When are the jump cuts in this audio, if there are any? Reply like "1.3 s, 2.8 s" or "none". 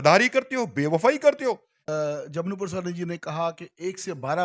1.8 s